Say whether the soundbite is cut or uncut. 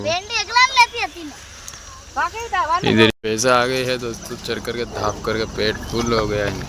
cut